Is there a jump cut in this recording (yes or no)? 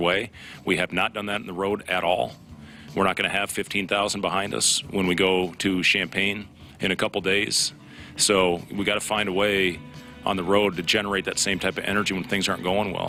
no